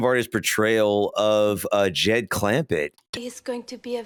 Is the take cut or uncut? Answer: uncut